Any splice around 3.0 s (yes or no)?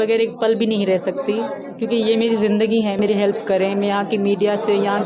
yes